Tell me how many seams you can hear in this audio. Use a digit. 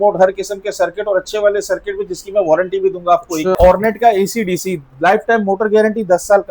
1